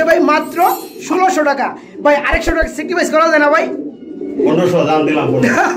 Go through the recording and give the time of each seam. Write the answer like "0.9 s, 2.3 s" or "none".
none